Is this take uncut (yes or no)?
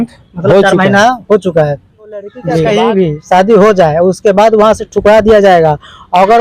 no